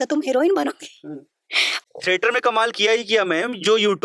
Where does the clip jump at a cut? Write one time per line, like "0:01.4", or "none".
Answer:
none